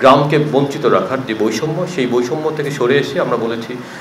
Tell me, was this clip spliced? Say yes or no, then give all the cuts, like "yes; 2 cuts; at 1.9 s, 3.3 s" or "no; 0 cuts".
no; 0 cuts